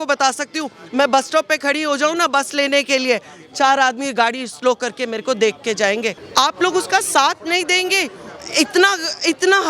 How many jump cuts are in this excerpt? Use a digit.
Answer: 1